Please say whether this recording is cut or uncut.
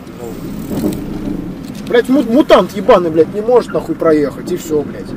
uncut